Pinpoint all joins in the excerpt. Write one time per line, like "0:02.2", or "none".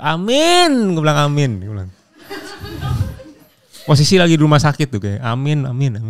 none